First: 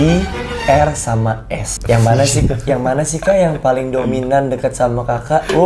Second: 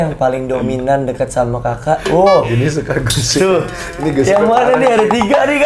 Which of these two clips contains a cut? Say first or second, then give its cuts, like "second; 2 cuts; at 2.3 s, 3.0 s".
first; 1 cut; at 1.7 s